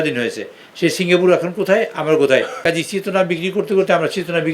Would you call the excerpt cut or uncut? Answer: cut